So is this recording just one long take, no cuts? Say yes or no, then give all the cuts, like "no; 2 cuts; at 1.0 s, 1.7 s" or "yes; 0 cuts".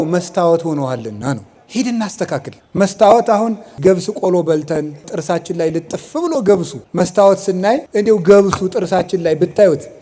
no; 6 cuts; at 1.6 s, 2.6 s, 3.8 s, 5.1 s, 6.8 s, 7.9 s